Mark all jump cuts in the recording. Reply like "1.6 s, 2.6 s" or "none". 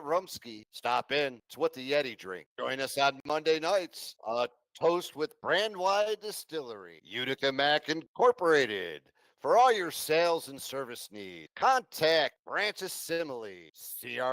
6.3 s